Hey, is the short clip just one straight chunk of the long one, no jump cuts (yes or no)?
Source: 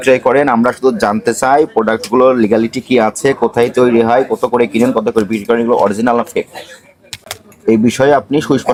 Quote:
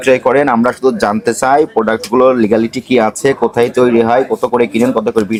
yes